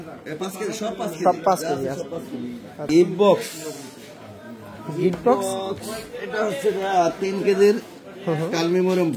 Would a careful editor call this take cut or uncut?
cut